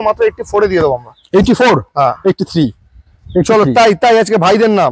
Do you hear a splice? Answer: no; 0 cuts

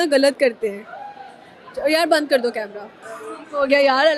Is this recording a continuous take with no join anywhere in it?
yes; 0 cuts

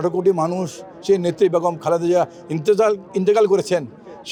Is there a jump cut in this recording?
no; 0 cuts

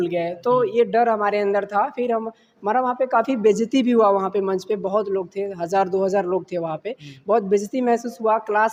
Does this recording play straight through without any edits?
yes; 0 cuts

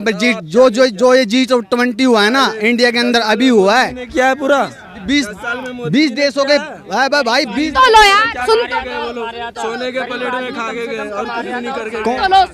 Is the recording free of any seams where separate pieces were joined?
yes; 0 cuts

